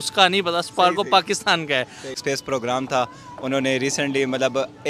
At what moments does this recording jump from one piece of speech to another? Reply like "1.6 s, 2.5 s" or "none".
2.2 s